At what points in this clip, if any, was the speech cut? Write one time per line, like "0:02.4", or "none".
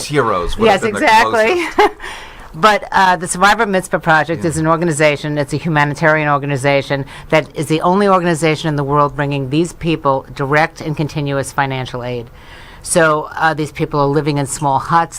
0:06.5

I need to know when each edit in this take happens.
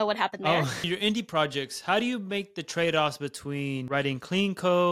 0:00.9
0:03.8

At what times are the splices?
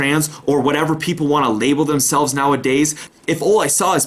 0:03.0

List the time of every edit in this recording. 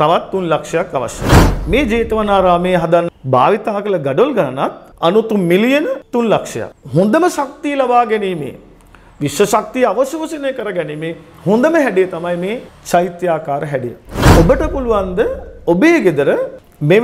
0:03.1
0:06.7
0:14.2

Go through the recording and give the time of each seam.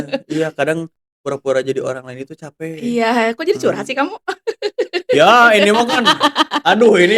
none

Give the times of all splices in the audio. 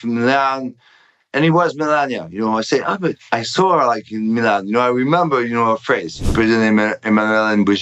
0:06.3

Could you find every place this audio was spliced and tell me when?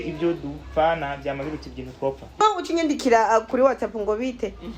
0:02.4

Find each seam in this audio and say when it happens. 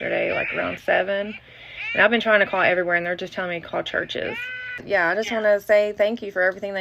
0:04.8

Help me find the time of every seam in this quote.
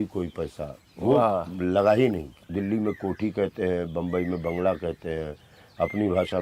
0:02.3

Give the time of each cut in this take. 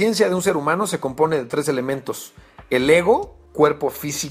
none

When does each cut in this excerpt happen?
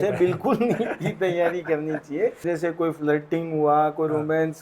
0:02.4

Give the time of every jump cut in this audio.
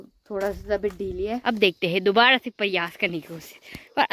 0:01.4

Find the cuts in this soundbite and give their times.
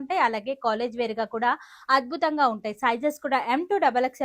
none

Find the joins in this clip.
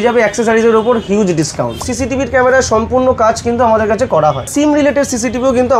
0:01.9
0:04.5

